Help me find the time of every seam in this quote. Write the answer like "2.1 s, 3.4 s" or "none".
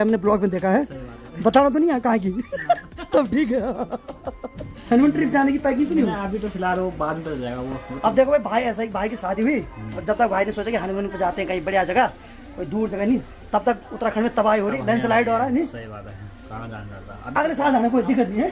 none

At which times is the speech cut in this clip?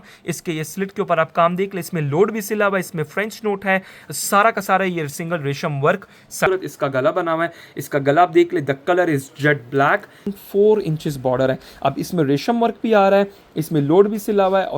6.5 s, 10.4 s

